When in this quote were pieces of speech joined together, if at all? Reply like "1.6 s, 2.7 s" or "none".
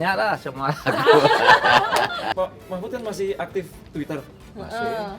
2.4 s